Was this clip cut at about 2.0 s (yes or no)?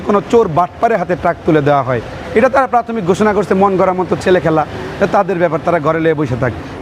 no